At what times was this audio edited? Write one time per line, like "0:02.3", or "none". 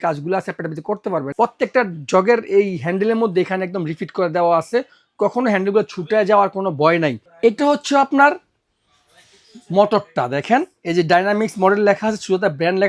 none